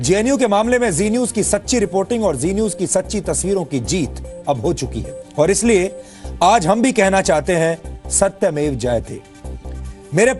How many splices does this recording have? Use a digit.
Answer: 1